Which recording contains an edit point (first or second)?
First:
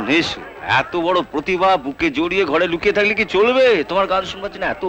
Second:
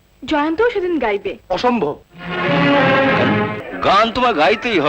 second